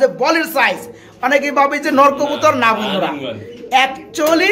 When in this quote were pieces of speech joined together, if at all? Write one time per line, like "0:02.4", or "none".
none